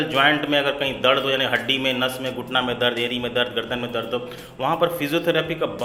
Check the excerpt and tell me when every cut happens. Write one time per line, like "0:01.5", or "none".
none

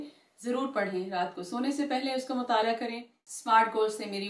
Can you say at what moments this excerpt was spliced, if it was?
0:02.8

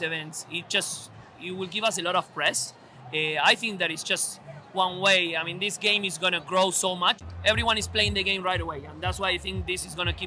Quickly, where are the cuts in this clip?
0:07.3

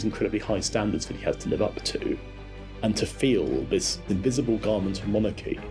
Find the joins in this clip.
0:02.4
0:04.0

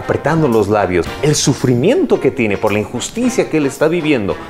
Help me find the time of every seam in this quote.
0:01.1

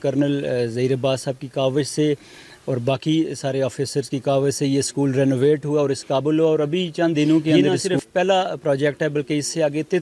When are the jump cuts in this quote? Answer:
0:07.7

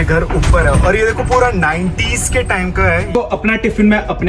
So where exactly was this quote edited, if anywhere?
0:03.1

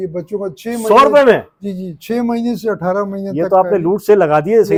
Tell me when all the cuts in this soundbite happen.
none

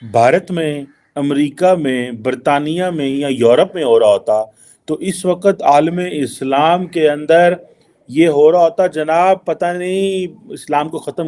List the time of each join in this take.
none

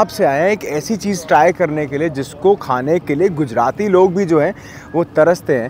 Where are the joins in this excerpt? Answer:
none

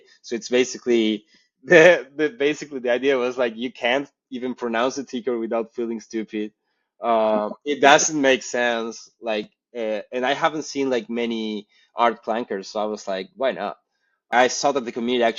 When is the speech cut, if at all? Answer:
0:14.3

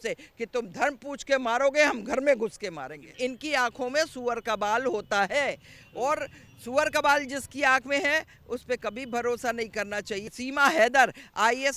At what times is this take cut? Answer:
0:03.1
0:10.2

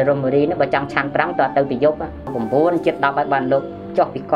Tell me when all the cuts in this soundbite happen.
0:02.3

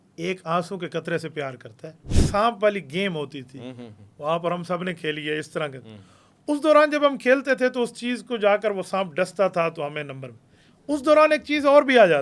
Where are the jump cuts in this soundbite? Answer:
0:02.2

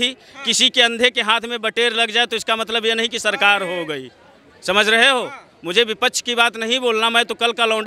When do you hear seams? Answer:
none

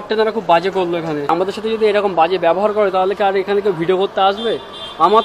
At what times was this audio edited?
0:01.3

